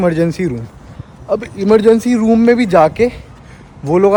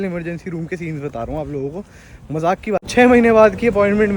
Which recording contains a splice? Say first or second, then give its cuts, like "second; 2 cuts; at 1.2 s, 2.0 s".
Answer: second; 1 cut; at 2.9 s